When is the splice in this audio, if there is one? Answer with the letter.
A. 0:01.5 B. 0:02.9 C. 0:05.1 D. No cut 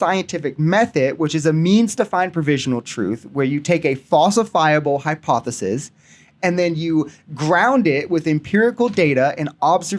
D